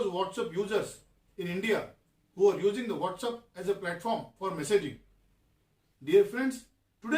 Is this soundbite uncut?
no; 1 cut; at 5.7 s

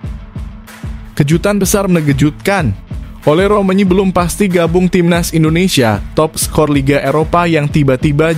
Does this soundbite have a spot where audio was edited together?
yes; 1 cut; at 1.1 s

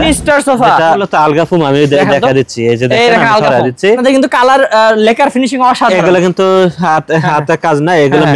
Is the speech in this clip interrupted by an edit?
yes; 2 cuts; at 1.0 s, 3.9 s

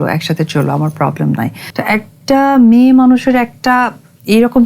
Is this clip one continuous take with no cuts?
no; 1 cut; at 1.6 s

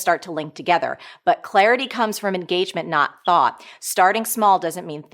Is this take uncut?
yes; 0 cuts

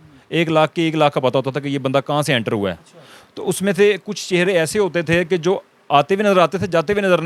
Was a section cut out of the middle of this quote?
no; 0 cuts

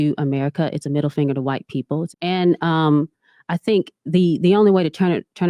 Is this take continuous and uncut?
no; 1 cut; at 2.1 s

